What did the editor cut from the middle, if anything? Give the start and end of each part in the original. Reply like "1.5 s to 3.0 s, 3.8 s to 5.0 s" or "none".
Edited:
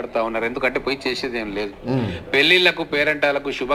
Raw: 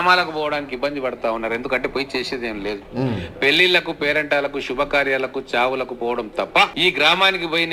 none